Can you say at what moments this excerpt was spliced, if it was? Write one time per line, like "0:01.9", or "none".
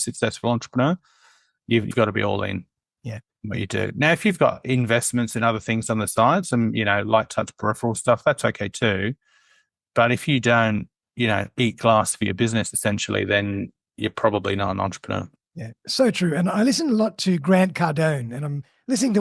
0:01.9